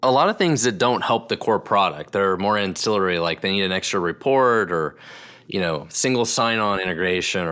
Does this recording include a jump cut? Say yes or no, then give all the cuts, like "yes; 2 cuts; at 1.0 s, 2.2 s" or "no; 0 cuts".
no; 0 cuts